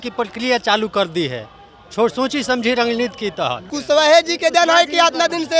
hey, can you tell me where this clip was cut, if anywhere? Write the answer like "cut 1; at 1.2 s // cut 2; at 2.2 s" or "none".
cut 1; at 3.7 s